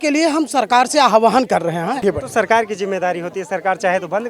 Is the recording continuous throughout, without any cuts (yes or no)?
no